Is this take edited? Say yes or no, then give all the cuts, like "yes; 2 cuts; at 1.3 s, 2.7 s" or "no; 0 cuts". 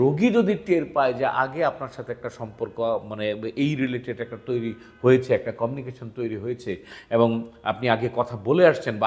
no; 0 cuts